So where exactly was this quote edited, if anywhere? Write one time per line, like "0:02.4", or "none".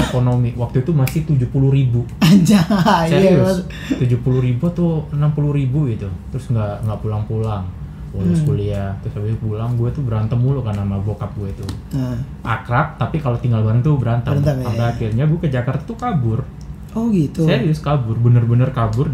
none

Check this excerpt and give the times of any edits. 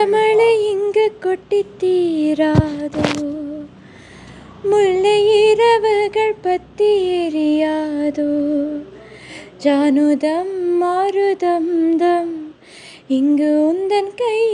none

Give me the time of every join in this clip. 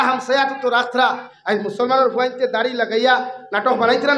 0:01.3

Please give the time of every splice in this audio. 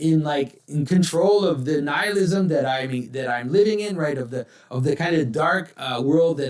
none

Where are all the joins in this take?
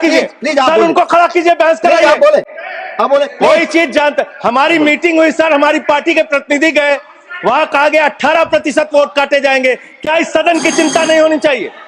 none

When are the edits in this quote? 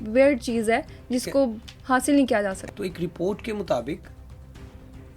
0:02.7

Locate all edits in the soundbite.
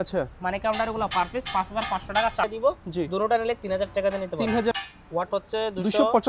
0:02.4
0:04.8

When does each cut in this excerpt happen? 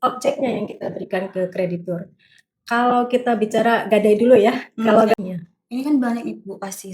0:05.2

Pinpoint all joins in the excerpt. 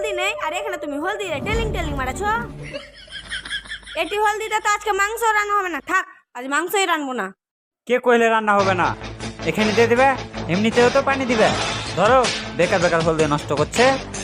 none

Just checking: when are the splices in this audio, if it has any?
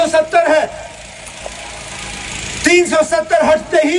none

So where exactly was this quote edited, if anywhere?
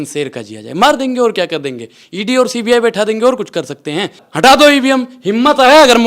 0:04.2

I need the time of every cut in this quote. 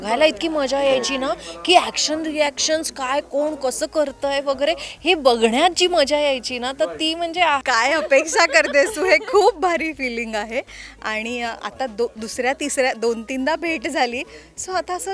0:07.6

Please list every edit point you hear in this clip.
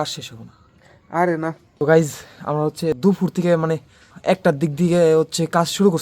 0:01.7
0:03.0
0:04.1

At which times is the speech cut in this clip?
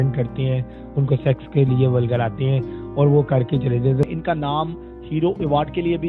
0:04.1

